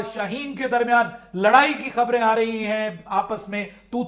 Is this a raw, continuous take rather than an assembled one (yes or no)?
yes